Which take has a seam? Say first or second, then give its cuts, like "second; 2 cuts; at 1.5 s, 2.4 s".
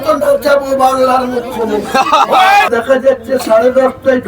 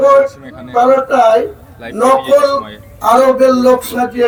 first; 1 cut; at 2.7 s